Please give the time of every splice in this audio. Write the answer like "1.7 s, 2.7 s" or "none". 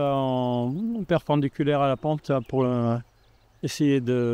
none